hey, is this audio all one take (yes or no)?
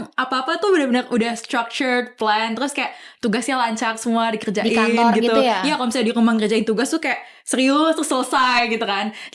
yes